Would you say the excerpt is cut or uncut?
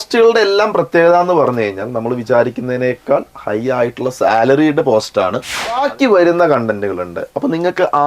cut